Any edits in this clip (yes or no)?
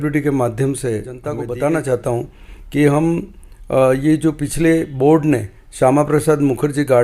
yes